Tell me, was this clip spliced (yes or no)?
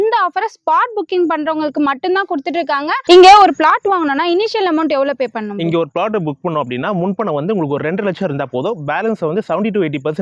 no